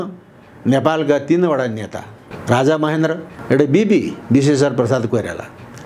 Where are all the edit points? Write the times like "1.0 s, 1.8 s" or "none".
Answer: 2.3 s, 3.3 s